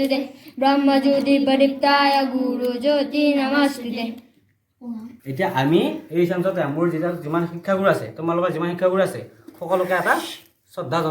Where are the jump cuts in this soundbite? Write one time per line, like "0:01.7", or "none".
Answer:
0:05.2